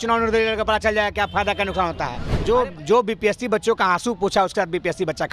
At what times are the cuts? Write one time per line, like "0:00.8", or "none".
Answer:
0:02.2